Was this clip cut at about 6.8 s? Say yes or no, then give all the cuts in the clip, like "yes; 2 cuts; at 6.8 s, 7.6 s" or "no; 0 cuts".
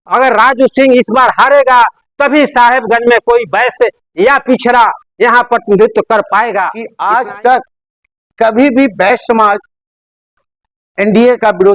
yes; 1 cut; at 6.8 s